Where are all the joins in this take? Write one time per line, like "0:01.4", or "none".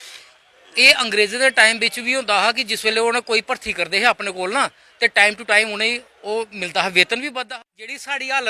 0:07.3